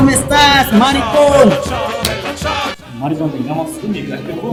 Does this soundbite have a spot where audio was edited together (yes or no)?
no